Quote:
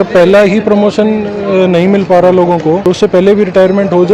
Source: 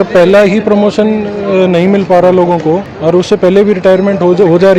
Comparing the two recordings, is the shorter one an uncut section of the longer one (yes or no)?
no